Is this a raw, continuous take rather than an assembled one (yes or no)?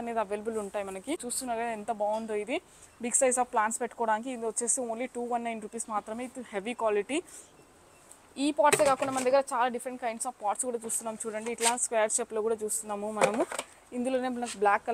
no